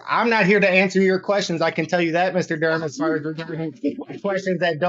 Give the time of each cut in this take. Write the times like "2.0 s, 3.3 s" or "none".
none